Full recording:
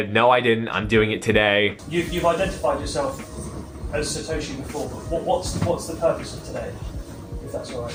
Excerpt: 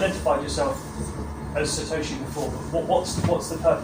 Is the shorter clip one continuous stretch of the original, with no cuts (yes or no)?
yes